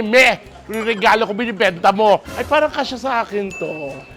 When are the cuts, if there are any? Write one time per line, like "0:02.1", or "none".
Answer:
0:02.3